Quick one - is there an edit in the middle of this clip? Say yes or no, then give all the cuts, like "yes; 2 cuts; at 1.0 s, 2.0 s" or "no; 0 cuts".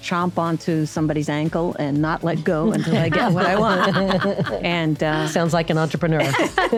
no; 0 cuts